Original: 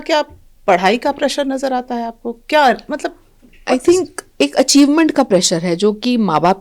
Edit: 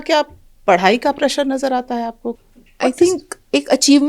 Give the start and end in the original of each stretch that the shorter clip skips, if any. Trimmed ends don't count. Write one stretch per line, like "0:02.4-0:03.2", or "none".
0:02.4-0:03.2